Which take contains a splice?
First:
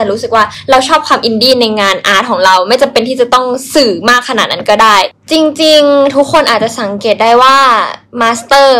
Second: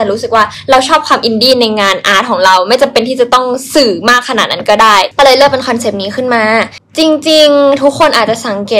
first; 1 cut; at 5.1 s

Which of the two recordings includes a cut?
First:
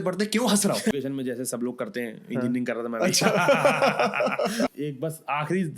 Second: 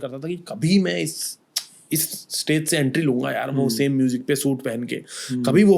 first; 2 cuts; at 0.9 s, 4.7 s

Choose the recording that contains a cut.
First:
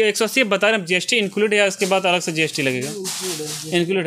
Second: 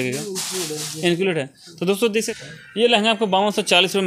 second; 1 cut; at 2.3 s

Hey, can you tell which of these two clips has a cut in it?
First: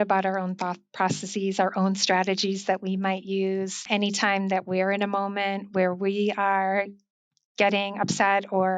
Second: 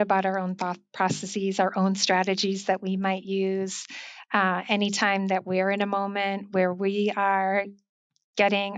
first; 1 cut; at 3.8 s

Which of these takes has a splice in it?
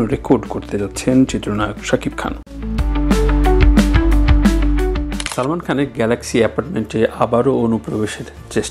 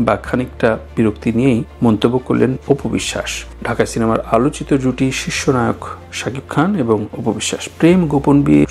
first; 1 cut; at 5.2 s

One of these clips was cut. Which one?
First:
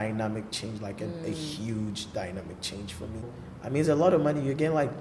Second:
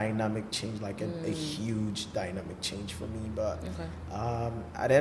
first; 1 cut; at 3.3 s

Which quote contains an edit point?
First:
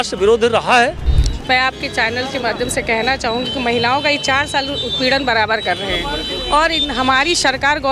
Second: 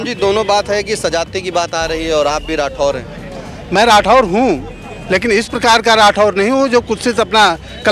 first; 1 cut; at 1.1 s

